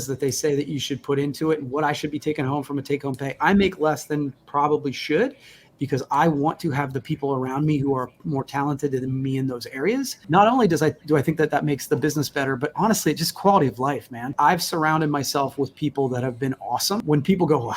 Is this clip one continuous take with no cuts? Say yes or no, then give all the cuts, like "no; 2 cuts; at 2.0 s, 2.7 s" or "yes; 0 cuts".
no; 3 cuts; at 10.2 s, 14.3 s, 17.0 s